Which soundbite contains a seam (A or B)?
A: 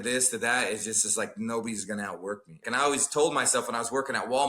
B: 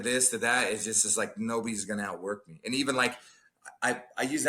A